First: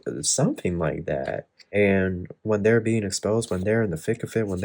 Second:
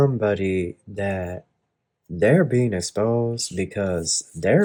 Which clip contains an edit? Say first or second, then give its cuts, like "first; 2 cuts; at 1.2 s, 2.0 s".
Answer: first; 1 cut; at 1.5 s